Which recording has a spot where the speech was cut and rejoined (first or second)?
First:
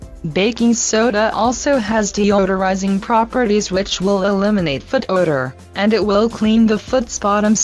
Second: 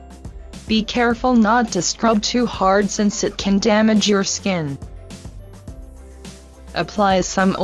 first